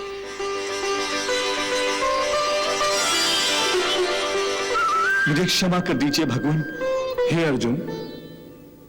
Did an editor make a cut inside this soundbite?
yes; 2 cuts; at 3.0 s, 6.8 s

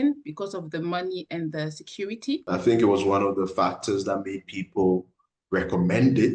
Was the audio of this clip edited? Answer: yes; 1 cut; at 2.4 s

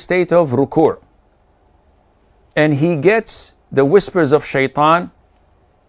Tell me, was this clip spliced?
no; 0 cuts

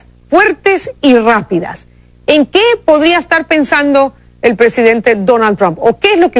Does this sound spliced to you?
no; 0 cuts

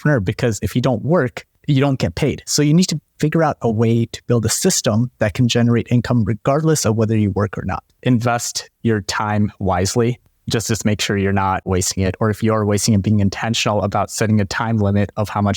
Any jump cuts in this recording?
yes; 2 cuts; at 7.8 s, 11.7 s

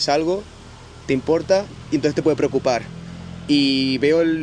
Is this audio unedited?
yes; 0 cuts

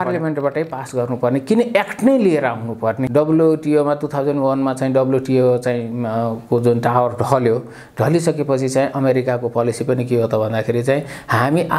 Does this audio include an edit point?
yes; 1 cut; at 3.0 s

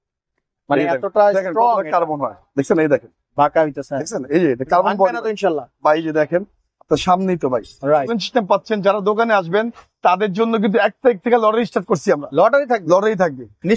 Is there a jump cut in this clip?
yes; 1 cut; at 8.2 s

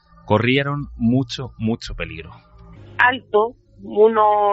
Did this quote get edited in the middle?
yes; 1 cut; at 2.8 s

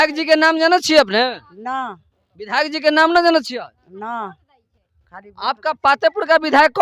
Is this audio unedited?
yes; 0 cuts

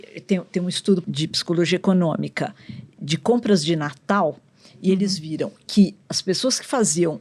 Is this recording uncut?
no; 1 cut; at 1.0 s

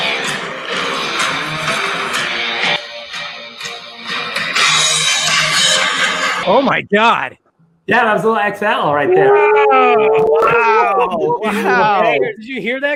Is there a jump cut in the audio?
no; 0 cuts

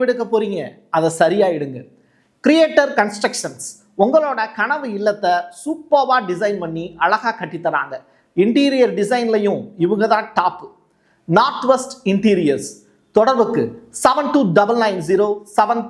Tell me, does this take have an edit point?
no; 0 cuts

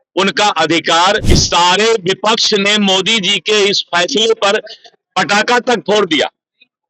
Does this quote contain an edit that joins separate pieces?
yes; 1 cut; at 1.3 s

